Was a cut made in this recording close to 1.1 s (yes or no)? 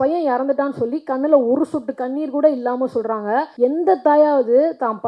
no